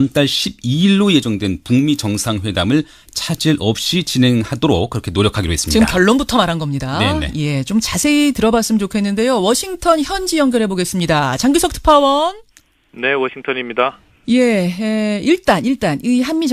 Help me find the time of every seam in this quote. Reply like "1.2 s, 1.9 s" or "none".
15.3 s